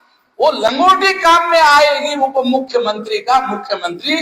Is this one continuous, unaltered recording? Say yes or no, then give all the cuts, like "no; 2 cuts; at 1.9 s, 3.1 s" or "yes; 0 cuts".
yes; 0 cuts